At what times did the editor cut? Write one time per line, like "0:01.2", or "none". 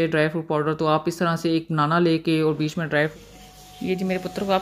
0:03.1